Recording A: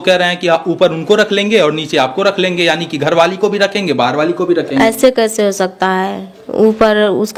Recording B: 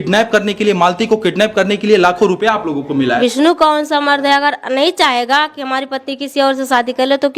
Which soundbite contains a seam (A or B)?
B